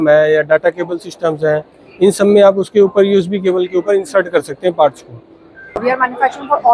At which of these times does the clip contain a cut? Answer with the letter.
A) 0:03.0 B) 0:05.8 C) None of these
B